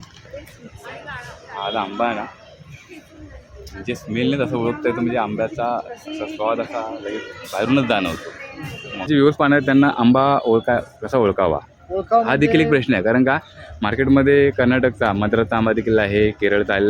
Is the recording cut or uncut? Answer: cut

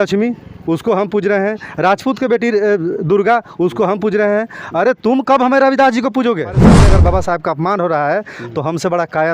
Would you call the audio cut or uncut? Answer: cut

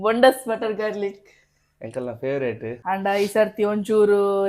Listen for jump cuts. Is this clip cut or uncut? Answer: cut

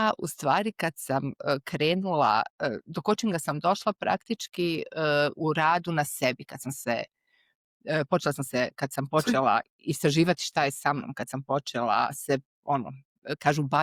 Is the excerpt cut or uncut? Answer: uncut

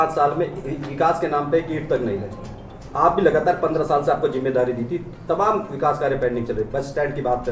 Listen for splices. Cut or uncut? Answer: uncut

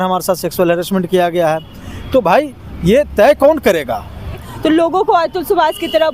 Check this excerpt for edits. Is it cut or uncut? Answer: cut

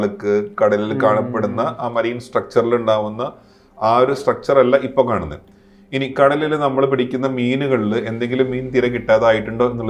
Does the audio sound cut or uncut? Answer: uncut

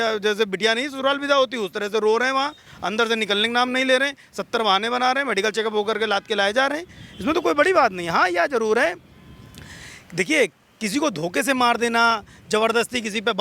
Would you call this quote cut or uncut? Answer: uncut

